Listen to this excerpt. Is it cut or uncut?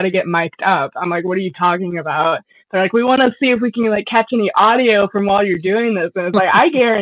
uncut